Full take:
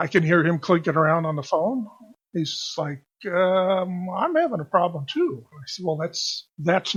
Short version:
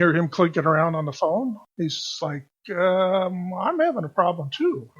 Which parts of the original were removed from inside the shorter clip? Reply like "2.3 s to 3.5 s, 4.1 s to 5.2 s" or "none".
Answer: 2.0 s to 2.2 s